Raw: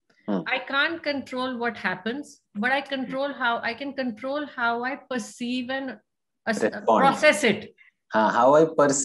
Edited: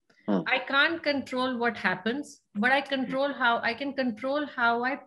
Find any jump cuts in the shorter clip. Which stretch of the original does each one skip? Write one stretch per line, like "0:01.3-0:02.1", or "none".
none